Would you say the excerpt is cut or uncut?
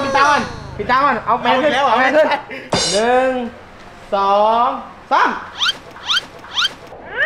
uncut